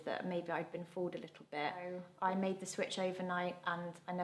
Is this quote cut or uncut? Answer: cut